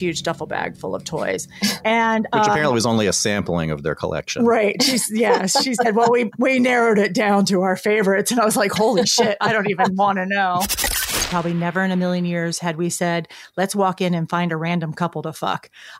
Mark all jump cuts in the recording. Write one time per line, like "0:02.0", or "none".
0:11.1